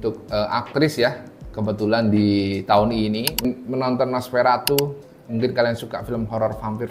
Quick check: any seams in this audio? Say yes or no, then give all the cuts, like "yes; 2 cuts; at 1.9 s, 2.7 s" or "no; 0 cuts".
yes; 1 cut; at 3.4 s